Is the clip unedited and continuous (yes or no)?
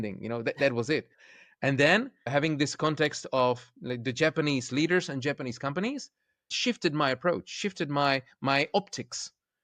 no